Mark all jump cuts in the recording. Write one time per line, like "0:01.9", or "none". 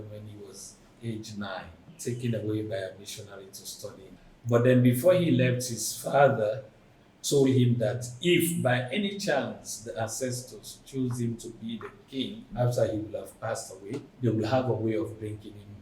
0:01.8
0:04.2
0:12.5
0:14.1